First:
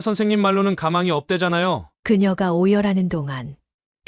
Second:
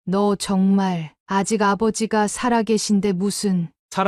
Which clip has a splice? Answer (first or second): first